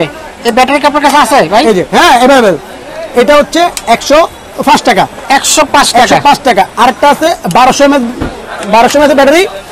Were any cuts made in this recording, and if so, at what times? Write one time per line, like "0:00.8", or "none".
none